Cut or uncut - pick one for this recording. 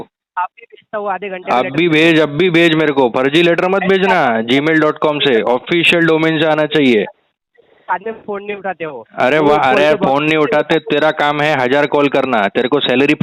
uncut